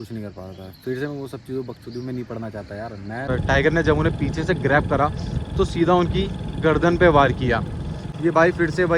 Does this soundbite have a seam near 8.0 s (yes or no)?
yes